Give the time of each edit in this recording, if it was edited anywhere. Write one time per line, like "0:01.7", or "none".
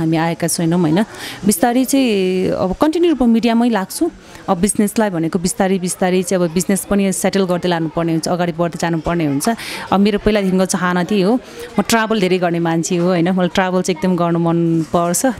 none